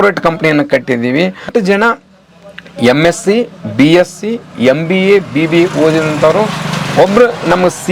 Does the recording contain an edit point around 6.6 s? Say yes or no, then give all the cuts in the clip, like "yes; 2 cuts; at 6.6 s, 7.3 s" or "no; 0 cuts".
no; 1 cut; at 1.5 s